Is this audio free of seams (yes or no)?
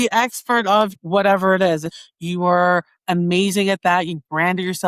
no